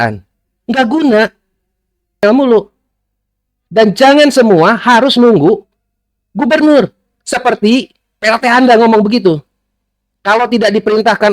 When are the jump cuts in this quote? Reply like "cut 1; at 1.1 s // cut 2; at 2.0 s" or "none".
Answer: cut 1; at 2.2 s